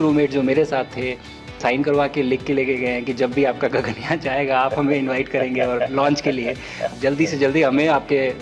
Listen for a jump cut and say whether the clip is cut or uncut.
cut